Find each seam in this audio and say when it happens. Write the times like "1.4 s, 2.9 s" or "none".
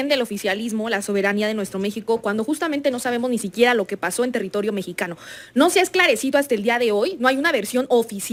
none